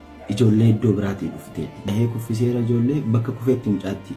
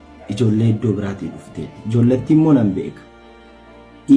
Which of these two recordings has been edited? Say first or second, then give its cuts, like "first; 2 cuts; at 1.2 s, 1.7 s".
first; 1 cut; at 1.8 s